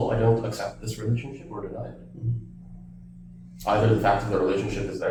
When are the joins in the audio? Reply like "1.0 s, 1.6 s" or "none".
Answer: none

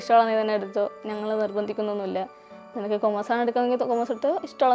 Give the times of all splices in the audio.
none

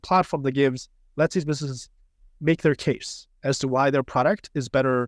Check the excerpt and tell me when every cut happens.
none

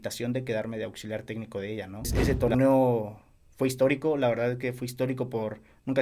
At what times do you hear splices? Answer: 2.1 s

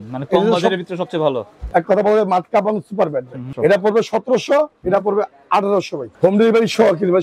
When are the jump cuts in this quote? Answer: 1.5 s, 3.5 s, 6.0 s

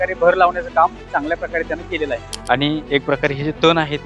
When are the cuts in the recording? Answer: 2.3 s

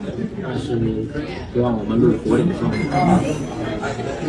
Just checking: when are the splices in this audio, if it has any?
none

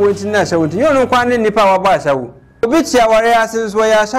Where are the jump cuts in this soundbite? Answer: 2.6 s

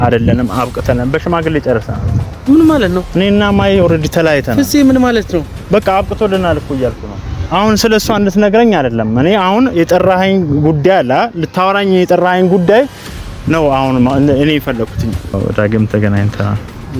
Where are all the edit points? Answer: 15.4 s

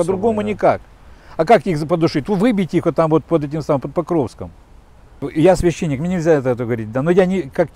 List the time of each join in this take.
5.3 s

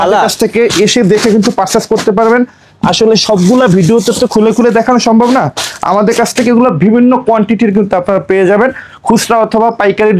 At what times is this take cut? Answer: none

